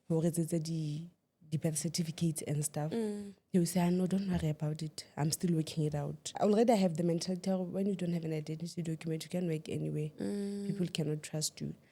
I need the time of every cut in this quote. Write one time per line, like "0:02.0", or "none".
0:06.4